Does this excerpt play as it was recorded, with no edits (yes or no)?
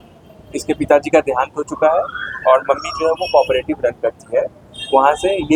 yes